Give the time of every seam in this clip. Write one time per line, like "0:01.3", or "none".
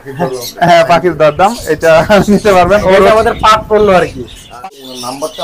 0:04.4